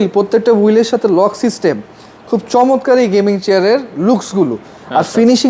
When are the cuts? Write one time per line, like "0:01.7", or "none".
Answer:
none